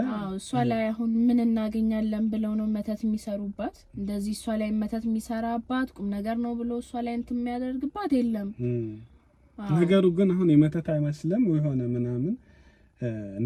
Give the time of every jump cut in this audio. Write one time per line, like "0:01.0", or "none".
none